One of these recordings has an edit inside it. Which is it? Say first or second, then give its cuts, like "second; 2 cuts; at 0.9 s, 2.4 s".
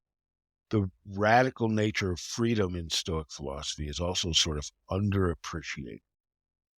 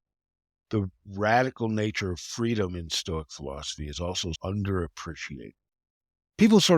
second; 1 cut; at 4.4 s